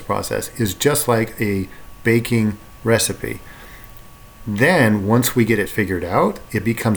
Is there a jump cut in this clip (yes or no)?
no